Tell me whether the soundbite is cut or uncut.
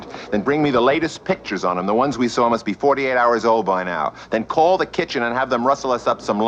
uncut